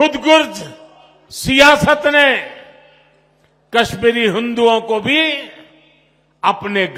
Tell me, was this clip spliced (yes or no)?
no